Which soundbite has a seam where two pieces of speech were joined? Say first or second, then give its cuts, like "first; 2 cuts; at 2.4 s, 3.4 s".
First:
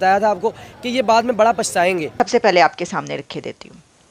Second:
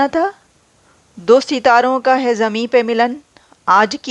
first; 1 cut; at 2.2 s